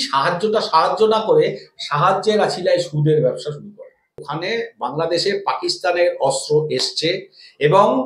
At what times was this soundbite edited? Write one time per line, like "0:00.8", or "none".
0:04.3